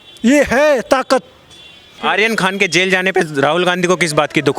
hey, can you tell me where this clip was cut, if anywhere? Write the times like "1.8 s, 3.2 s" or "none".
2.0 s